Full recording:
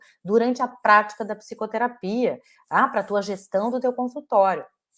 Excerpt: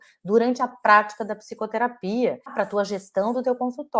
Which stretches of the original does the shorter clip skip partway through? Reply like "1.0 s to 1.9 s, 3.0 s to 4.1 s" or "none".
2.5 s to 2.9 s